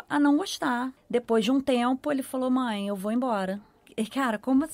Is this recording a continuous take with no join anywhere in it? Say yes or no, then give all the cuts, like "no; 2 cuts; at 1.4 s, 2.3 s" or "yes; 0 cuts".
no; 2 cuts; at 0.9 s, 3.9 s